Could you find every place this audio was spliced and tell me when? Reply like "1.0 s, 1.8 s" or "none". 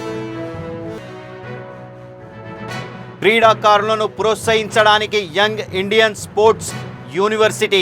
1.0 s